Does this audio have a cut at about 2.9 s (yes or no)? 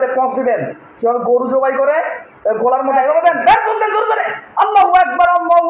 yes